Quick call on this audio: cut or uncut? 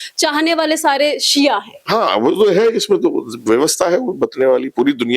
cut